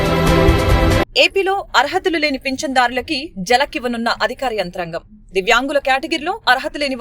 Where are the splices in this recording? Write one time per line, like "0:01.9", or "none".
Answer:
0:01.0